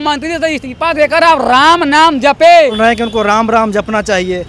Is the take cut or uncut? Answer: cut